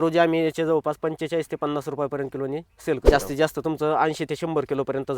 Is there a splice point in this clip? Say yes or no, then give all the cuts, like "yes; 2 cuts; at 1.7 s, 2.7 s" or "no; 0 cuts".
yes; 1 cut; at 3.0 s